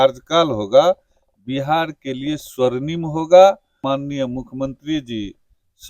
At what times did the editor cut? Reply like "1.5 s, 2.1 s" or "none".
3.8 s